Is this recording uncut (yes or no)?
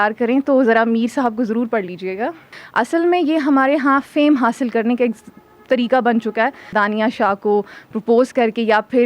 no